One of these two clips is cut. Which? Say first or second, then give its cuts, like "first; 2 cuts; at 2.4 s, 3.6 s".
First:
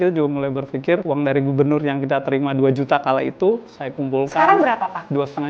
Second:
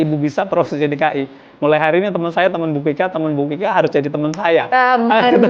first; 1 cut; at 1.0 s